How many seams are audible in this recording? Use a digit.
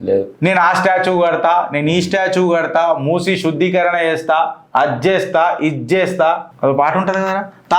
2